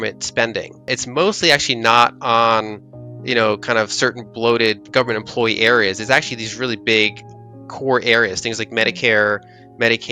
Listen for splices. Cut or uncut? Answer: cut